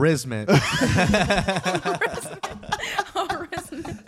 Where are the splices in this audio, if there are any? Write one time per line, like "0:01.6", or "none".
none